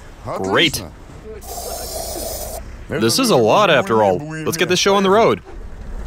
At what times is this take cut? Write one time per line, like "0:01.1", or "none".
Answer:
none